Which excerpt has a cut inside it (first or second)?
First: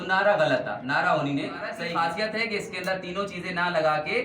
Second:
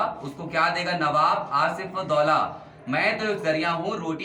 first